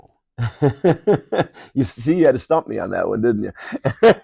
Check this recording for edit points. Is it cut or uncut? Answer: uncut